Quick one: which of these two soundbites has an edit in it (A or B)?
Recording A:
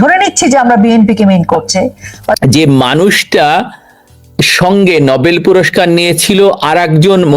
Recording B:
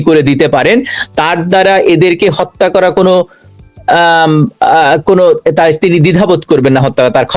A